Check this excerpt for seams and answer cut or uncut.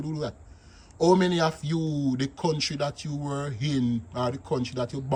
uncut